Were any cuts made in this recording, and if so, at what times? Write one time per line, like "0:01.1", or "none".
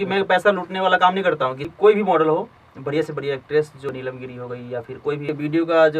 0:01.6
0:03.9
0:05.2